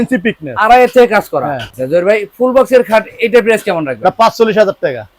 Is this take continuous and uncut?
yes; 0 cuts

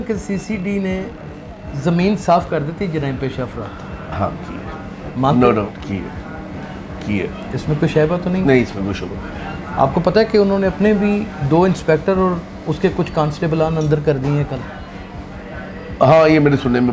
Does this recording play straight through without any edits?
yes; 0 cuts

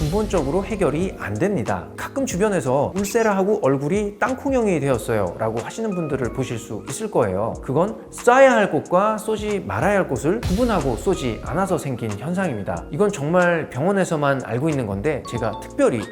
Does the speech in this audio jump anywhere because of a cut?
yes; 2 cuts; at 1.9 s, 12.8 s

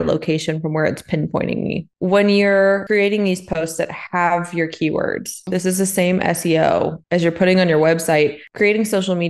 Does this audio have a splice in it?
yes; 3 cuts; at 2.0 s, 2.8 s, 5.4 s

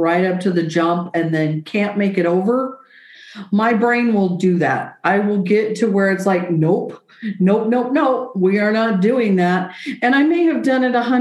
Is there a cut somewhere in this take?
no; 0 cuts

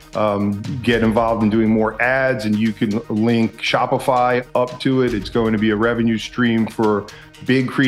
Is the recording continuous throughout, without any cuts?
yes; 0 cuts

